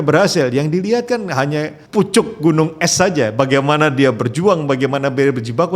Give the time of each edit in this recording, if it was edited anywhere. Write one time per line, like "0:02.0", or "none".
0:01.8

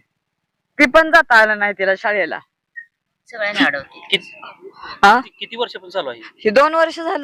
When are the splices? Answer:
none

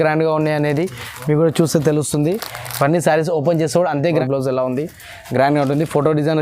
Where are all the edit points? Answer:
0:04.0

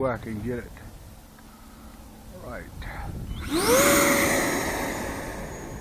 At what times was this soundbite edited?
none

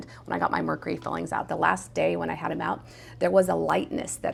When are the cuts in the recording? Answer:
none

